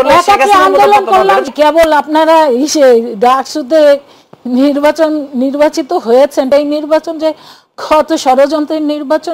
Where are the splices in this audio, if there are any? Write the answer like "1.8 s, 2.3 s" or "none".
1.5 s, 6.5 s